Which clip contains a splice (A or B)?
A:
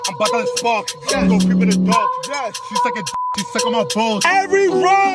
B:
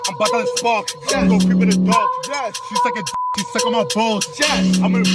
A